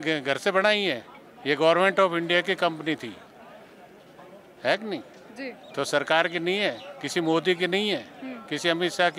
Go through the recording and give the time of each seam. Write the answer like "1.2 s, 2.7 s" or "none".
none